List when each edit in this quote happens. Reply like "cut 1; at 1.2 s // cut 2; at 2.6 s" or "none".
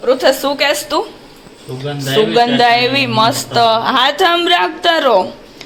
none